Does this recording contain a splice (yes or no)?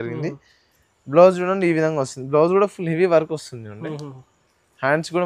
no